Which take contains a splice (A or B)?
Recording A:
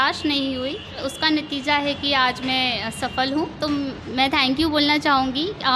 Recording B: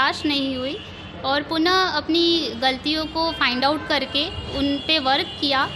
A